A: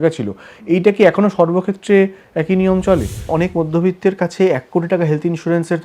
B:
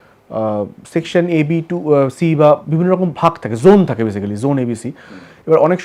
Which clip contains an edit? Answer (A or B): A